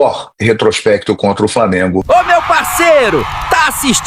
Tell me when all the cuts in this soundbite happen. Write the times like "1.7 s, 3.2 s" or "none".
2.0 s